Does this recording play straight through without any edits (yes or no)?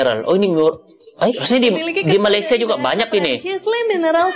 no